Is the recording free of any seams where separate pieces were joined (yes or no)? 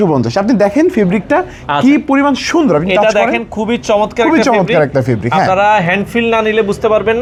yes